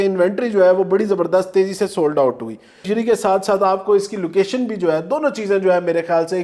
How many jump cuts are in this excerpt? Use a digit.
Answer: 1